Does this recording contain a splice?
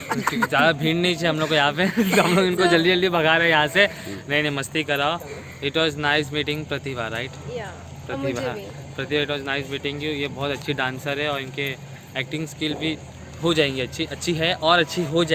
no; 0 cuts

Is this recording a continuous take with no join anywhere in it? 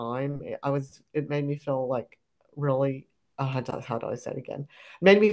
yes; 0 cuts

